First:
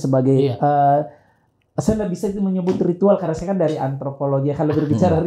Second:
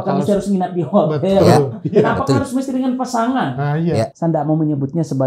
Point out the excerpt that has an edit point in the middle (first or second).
second